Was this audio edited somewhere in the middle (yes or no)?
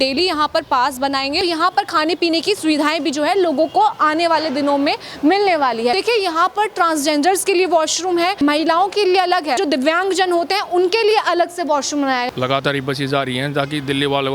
yes